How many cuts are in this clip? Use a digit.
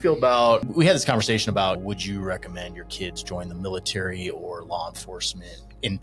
1